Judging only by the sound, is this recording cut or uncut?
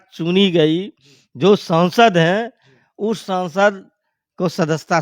uncut